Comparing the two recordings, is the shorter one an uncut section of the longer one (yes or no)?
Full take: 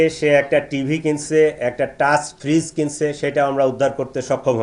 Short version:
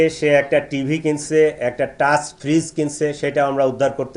yes